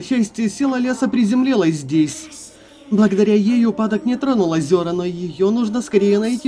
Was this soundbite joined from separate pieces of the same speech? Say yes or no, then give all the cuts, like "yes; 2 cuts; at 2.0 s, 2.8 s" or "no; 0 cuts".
no; 0 cuts